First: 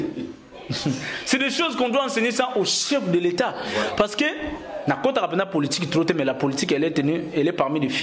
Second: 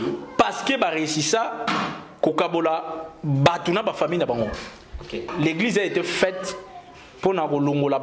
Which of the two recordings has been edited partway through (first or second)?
second